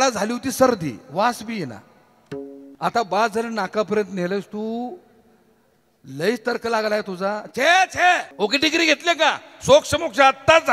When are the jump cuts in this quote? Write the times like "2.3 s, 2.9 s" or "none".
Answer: 2.6 s, 8.3 s